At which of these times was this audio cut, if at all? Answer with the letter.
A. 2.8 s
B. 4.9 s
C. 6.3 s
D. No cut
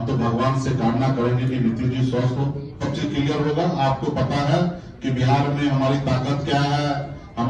A